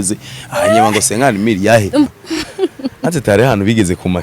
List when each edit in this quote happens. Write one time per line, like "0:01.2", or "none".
0:02.1